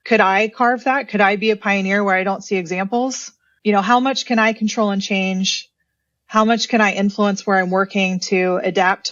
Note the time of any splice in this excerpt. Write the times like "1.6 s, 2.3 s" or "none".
none